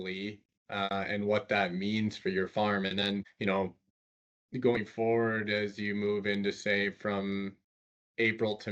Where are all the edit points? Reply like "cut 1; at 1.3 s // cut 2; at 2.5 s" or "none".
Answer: none